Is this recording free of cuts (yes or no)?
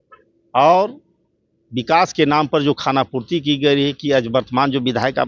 yes